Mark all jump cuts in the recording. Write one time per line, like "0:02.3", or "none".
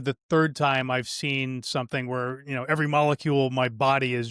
none